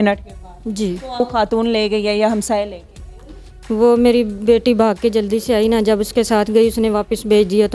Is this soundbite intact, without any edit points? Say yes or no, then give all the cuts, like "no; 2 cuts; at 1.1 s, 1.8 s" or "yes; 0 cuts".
no; 1 cut; at 1.2 s